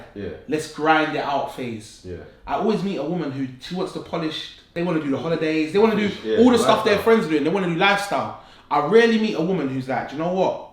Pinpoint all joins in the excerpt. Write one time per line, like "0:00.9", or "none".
0:04.6